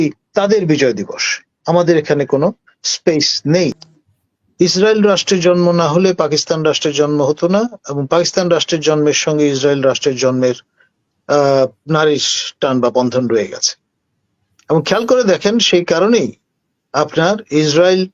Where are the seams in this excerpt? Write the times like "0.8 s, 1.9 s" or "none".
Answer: 3.8 s